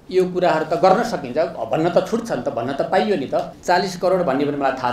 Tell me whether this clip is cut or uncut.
cut